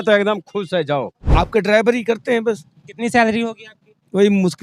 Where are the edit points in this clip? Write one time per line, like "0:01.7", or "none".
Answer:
0:01.2